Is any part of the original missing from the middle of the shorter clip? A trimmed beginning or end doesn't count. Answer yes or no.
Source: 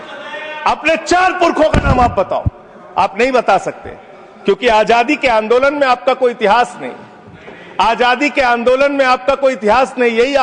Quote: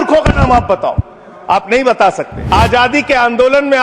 yes